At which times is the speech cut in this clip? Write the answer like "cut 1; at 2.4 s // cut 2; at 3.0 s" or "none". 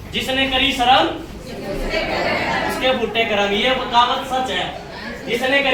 none